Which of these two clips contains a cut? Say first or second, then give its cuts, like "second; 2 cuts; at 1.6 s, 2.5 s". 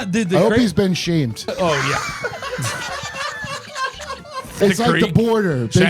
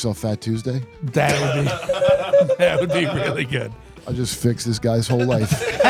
first; 2 cuts; at 1.5 s, 4.6 s